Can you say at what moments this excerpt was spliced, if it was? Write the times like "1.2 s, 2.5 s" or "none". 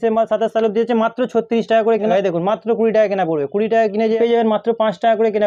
2.1 s, 4.2 s

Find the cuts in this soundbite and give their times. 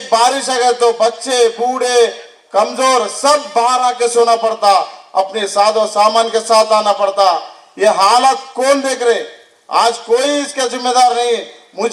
none

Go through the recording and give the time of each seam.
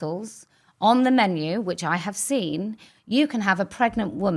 none

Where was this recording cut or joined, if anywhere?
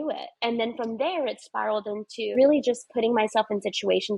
2.3 s

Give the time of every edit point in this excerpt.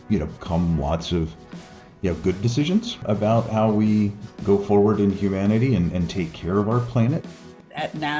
3.0 s, 4.2 s, 7.3 s

